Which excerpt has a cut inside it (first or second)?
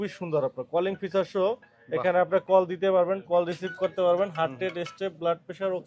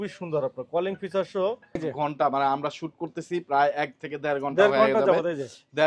second